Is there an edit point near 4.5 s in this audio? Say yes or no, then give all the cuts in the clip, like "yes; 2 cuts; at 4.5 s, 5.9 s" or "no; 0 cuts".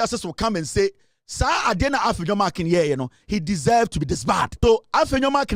yes; 1 cut; at 4.5 s